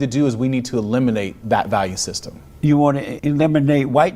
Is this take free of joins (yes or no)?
no